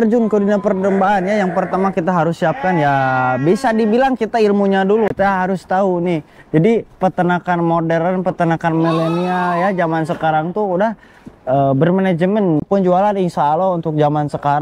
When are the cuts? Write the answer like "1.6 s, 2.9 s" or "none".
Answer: 5.1 s, 12.6 s